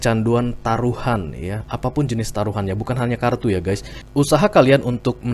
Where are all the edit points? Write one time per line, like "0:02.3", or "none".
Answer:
0:03.9